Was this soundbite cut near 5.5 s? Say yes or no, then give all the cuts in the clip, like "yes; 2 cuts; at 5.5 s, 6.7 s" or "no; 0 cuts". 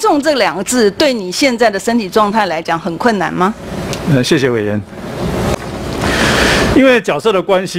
yes; 1 cut; at 5.5 s